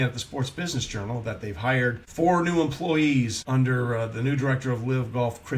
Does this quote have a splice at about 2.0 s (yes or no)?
yes